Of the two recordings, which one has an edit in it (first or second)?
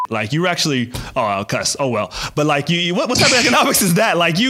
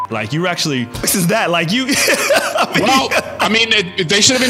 second